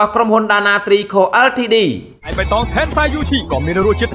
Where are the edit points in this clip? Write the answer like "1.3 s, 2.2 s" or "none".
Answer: 2.3 s

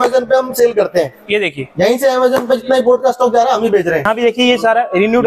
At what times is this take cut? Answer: 4.1 s

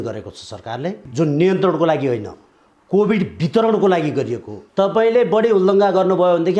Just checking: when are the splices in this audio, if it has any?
1.0 s, 4.6 s

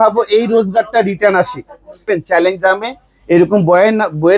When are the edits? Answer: 2.0 s

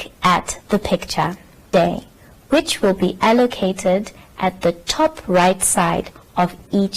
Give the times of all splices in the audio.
1.7 s

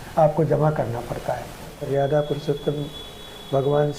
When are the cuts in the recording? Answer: 1.7 s

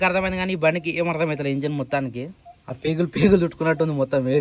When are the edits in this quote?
2.8 s

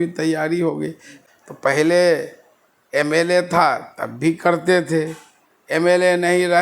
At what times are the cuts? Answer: 1.1 s

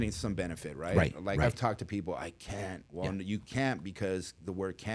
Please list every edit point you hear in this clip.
2.8 s

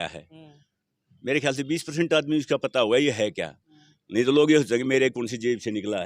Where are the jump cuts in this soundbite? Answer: none

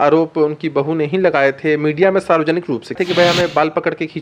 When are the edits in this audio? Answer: 2.9 s

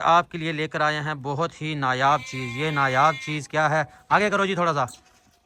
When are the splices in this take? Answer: none

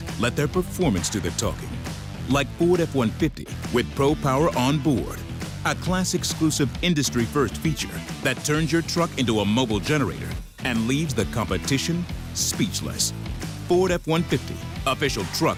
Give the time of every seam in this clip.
none

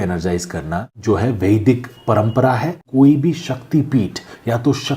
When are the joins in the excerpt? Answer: 0.9 s, 2.9 s

